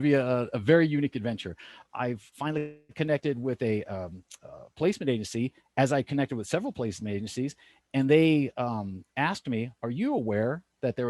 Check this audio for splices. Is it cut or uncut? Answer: cut